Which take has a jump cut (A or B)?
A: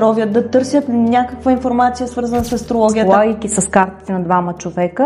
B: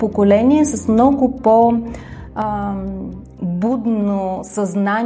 A